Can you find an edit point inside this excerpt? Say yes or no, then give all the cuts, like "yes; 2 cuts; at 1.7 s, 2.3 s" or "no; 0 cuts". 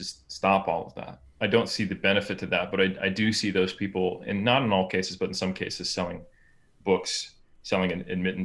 no; 0 cuts